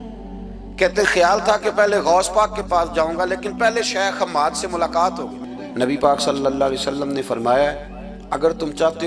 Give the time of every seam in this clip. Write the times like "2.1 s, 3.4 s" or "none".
5.4 s